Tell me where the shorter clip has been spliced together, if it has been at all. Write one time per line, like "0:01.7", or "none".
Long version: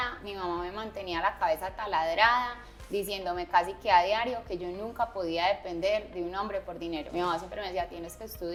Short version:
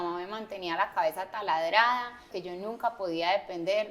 0:02.3